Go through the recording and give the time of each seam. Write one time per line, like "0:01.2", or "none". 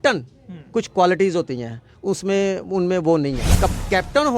0:03.5